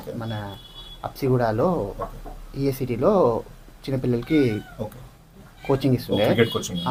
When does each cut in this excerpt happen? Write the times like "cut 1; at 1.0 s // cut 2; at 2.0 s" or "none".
none

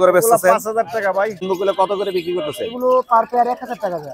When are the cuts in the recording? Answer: cut 1; at 1.5 s

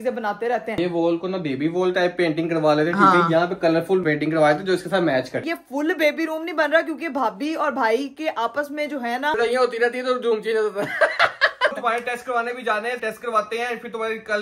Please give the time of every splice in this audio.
cut 1; at 0.8 s // cut 2; at 4.0 s // cut 3; at 5.4 s // cut 4; at 9.3 s // cut 5; at 11.8 s // cut 6; at 13.0 s

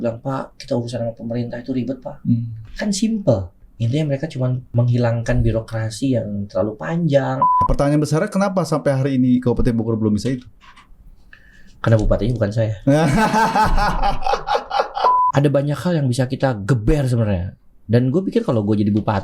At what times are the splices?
cut 1; at 2.6 s // cut 2; at 4.6 s // cut 3; at 7.7 s // cut 4; at 15.1 s

